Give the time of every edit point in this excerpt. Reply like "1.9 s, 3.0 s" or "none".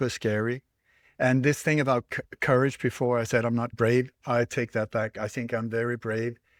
none